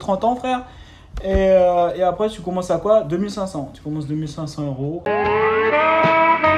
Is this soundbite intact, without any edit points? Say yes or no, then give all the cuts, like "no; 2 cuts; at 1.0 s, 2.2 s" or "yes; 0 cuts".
no; 1 cut; at 5.0 s